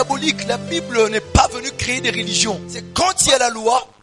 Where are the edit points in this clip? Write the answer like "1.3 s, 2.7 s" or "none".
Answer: 2.9 s